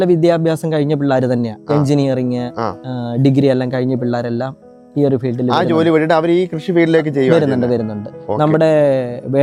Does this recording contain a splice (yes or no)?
no